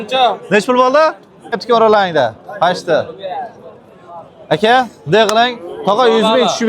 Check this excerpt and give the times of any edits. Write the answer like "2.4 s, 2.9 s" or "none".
1.6 s